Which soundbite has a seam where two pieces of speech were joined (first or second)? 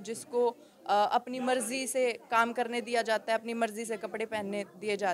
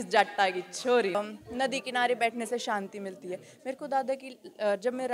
second